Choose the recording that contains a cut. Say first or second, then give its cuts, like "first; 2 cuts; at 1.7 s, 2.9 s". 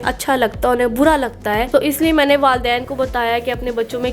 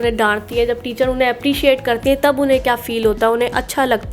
first; 1 cut; at 1.6 s